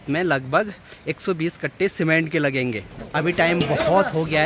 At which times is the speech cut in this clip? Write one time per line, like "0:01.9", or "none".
0:03.0